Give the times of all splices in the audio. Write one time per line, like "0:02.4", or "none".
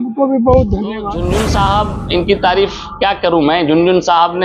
0:01.1